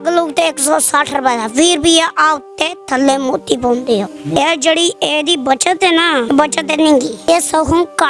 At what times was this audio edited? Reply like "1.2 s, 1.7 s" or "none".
4.4 s, 6.3 s, 7.3 s